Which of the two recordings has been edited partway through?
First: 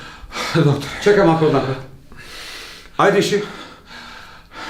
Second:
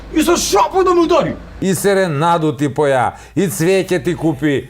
second; 1 cut; at 1.5 s

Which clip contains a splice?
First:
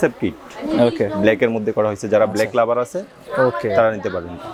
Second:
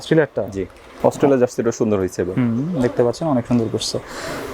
second; 1 cut; at 0.9 s

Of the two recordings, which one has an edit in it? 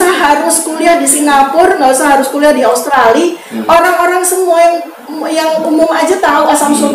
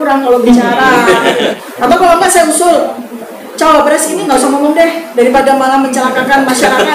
second; 1 cut; at 1.5 s

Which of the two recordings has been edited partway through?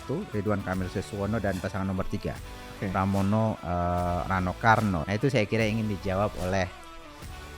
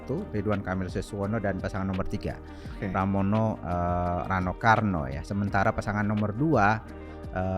first; 1 cut; at 5.0 s

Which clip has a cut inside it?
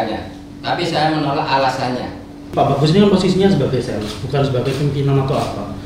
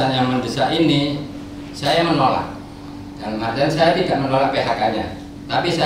first; 1 cut; at 2.5 s

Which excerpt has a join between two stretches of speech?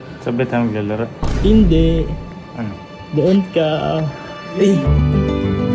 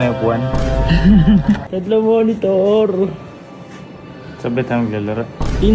second; 1 cut; at 1.6 s

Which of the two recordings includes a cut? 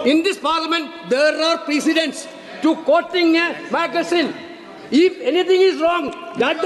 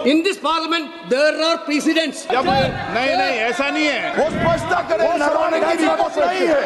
second; 2 cuts; at 2.3 s, 4.1 s

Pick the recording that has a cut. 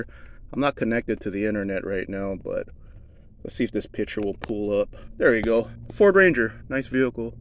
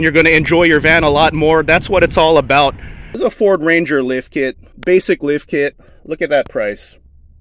second; 1 cut; at 3.1 s

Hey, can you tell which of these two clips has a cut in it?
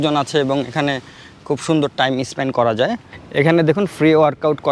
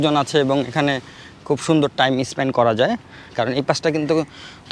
first; 1 cut; at 3.2 s

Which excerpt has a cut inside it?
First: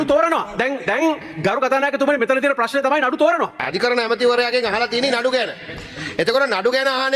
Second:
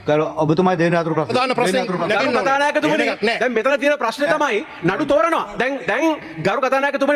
first; 1 cut; at 3.6 s

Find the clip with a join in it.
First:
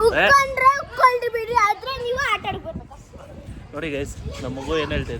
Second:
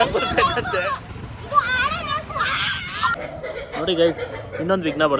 second; 1 cut; at 3.1 s

